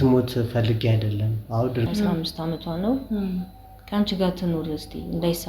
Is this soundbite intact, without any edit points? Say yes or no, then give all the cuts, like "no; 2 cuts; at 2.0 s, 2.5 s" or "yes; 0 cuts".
no; 1 cut; at 1.9 s